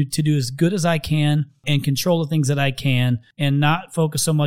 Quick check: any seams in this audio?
yes; 2 cuts; at 1.6 s, 3.3 s

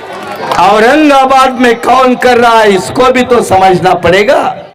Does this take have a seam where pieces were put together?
no; 0 cuts

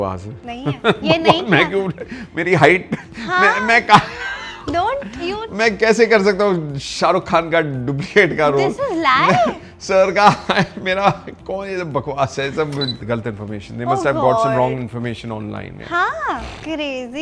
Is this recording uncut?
no; 1 cut; at 13.0 s

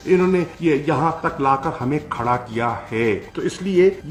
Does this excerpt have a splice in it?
no; 0 cuts

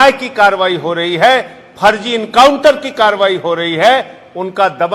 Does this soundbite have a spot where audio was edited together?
no; 0 cuts

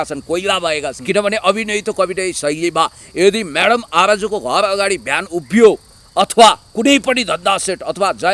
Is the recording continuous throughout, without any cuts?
no; 1 cut; at 1.0 s

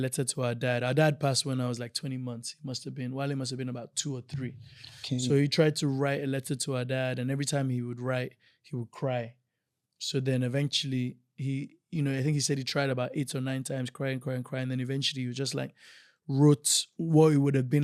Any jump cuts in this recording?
no; 0 cuts

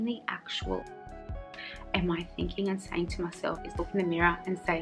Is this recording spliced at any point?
yes; 1 cut; at 3.7 s

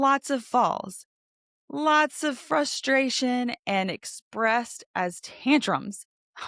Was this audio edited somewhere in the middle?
no; 0 cuts

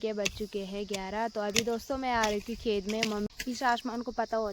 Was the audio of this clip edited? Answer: yes; 1 cut; at 3.3 s

